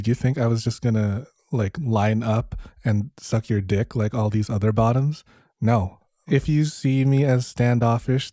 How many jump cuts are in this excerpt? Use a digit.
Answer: 1